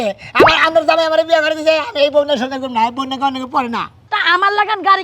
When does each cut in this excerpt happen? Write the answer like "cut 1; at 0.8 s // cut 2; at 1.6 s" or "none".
cut 1; at 4.0 s

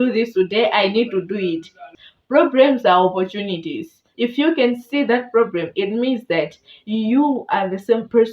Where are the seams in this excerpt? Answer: cut 1; at 1.8 s // cut 2; at 4.0 s

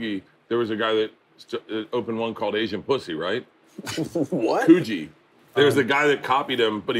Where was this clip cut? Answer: cut 1; at 5.5 s

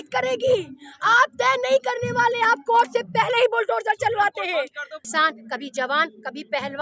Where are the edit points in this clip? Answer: cut 1; at 5.0 s

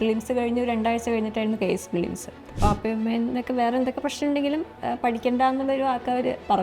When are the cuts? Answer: cut 1; at 2.5 s

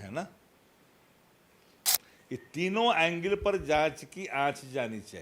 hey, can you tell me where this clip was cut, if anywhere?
cut 1; at 1.8 s

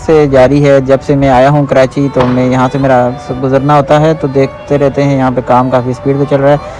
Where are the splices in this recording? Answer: none

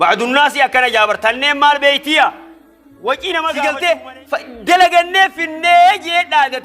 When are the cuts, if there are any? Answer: cut 1; at 3.5 s

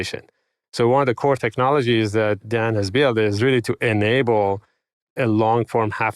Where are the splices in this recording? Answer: cut 1; at 2.4 s

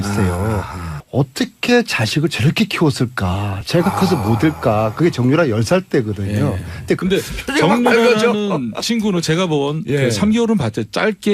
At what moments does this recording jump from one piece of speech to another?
none

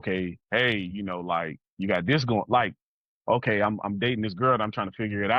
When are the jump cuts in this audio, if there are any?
none

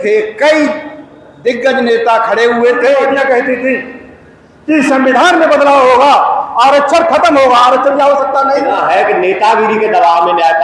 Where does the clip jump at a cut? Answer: cut 1; at 3.2 s // cut 2; at 8.8 s

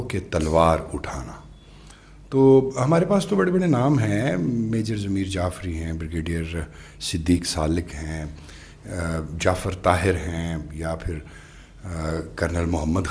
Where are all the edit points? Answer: none

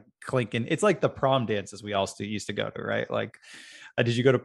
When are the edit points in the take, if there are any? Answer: none

